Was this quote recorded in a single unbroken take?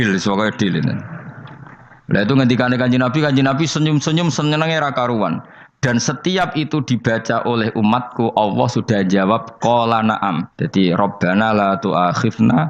no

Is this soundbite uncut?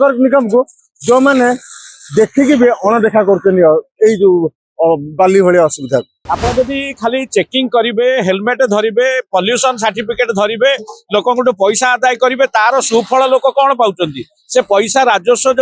no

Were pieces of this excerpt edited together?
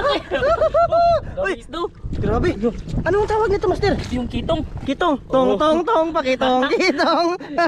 no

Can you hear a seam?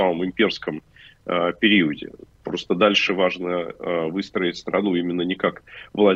no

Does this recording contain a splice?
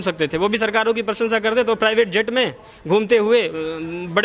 no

